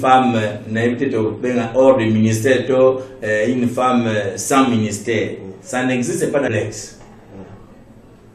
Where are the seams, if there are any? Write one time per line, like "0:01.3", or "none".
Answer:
0:06.5

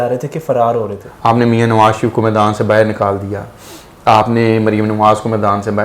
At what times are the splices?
0:01.0

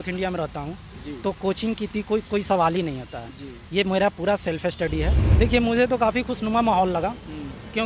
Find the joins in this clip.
0:05.2

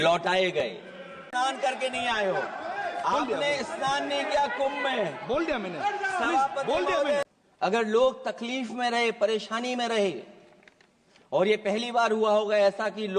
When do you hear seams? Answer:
0:01.2
0:07.2

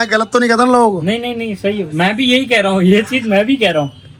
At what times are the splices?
none

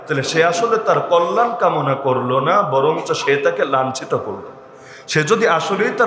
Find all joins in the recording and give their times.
none

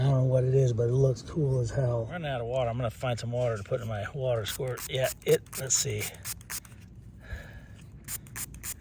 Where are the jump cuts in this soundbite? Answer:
0:02.2

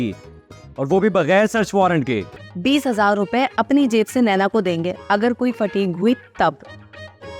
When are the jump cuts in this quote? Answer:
0:02.4

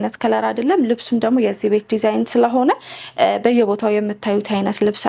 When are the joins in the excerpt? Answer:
none

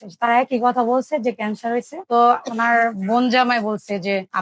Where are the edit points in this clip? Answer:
0:02.0

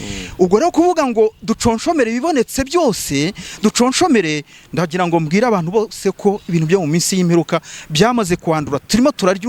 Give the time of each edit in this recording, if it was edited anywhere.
none

